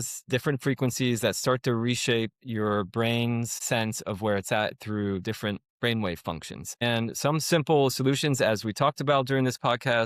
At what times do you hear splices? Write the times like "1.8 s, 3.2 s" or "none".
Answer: 3.6 s, 6.8 s